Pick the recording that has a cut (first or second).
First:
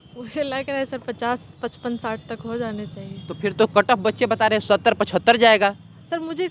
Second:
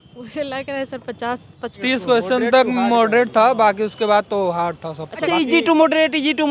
second